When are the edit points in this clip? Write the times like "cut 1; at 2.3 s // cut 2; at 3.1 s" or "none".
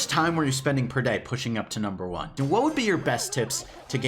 cut 1; at 2.3 s